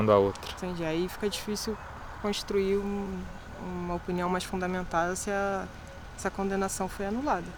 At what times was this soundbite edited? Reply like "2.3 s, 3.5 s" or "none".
none